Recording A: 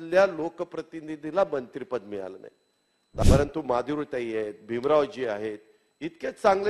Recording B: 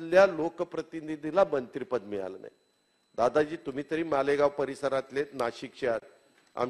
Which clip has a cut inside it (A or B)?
A